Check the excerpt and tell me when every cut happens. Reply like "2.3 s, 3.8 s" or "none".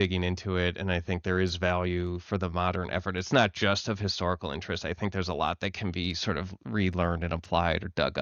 none